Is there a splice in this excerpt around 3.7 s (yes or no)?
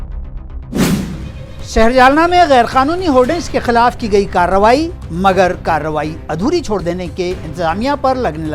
no